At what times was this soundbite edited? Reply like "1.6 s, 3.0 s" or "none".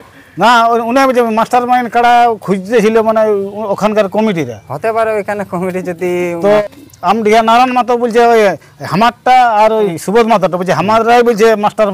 6.9 s, 10.0 s

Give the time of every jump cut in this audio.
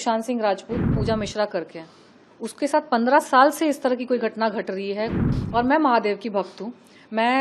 1.0 s, 5.2 s

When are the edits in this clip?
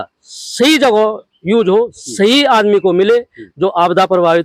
none

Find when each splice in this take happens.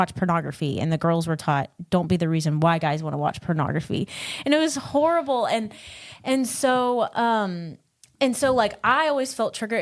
none

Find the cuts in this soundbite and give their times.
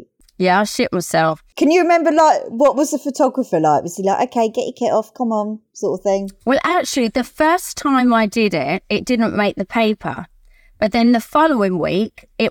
1.4 s

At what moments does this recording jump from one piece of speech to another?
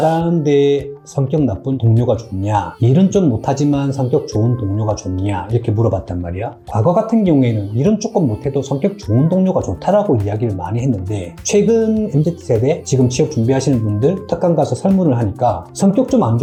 none

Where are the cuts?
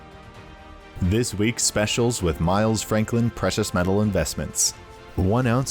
1.0 s

